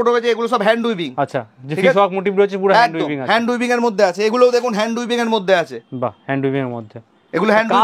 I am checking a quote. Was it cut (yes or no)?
no